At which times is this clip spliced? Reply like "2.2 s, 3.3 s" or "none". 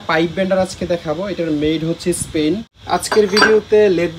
2.7 s